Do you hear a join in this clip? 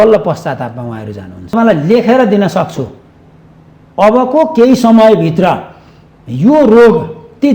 yes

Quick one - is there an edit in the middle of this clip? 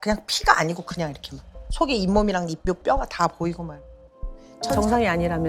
yes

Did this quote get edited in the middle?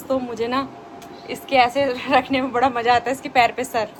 no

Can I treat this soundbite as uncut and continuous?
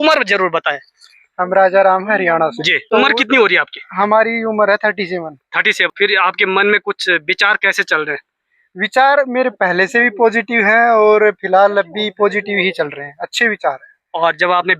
no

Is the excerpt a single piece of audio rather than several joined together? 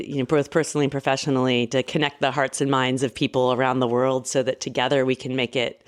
yes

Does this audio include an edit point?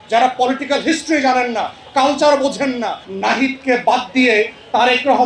yes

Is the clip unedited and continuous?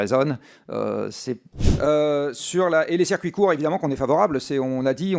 no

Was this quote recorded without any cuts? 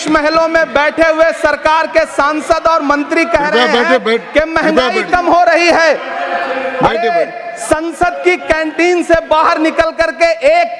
yes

